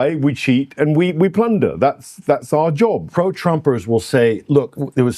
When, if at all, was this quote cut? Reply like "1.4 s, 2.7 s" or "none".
3.1 s